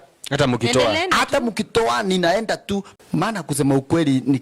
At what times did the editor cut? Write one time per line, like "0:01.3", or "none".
0:02.9